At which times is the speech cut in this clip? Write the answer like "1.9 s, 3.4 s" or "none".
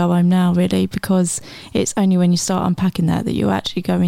none